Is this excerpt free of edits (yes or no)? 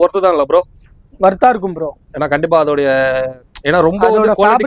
yes